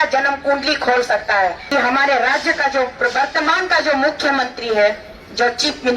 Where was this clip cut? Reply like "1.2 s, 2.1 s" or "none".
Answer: 1.6 s